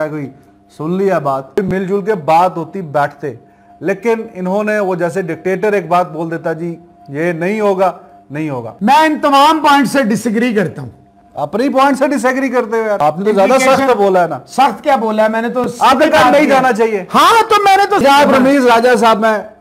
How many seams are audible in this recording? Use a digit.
4